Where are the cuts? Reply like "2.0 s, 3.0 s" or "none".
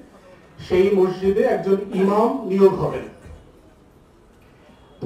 none